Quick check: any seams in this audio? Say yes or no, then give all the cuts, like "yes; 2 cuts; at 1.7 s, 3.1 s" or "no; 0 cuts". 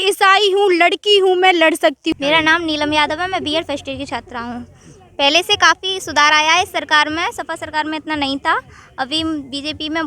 yes; 1 cut; at 2.0 s